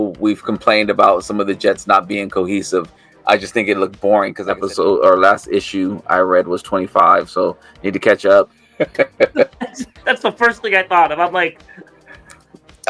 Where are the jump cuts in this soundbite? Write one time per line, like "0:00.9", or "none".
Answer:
0:04.4
0:08.6